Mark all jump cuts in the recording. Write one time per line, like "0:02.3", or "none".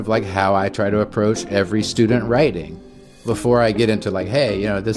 0:02.9